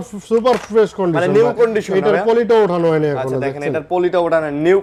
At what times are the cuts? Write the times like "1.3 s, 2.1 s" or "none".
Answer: none

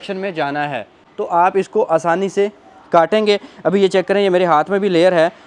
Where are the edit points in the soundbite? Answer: none

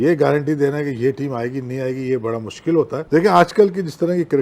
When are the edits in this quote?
3.0 s

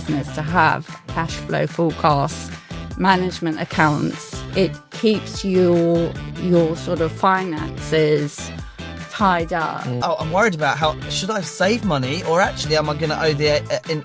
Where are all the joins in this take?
4.8 s, 10.0 s

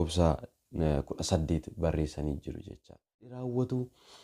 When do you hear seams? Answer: 3.3 s

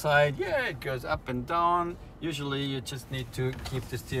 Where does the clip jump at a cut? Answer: none

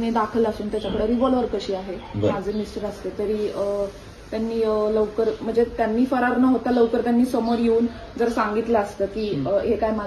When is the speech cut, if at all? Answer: 2.3 s

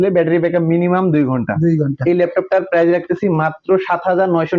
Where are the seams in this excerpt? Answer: none

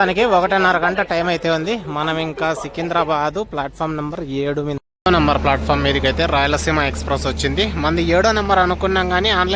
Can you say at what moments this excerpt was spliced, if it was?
4.8 s

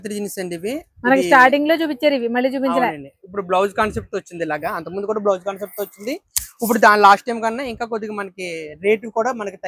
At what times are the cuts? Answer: none

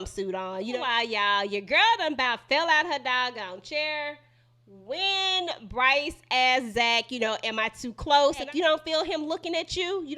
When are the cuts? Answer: 0.8 s, 8.4 s

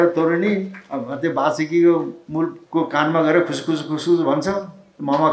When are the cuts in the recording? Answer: 2.6 s

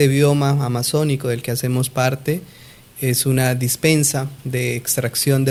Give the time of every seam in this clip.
none

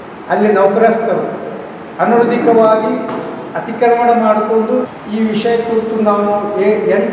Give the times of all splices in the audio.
4.9 s

